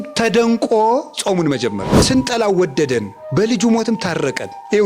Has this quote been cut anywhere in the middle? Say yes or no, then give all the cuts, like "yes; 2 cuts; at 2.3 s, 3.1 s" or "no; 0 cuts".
yes; 1 cut; at 1.9 s